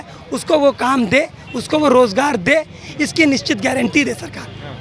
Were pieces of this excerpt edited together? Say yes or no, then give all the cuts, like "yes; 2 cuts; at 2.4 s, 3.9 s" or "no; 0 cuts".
no; 0 cuts